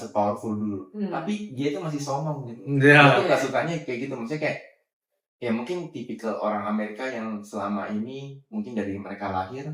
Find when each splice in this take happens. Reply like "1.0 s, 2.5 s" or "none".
none